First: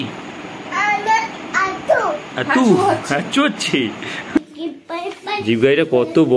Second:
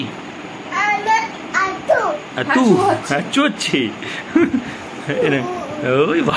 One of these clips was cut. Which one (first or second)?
first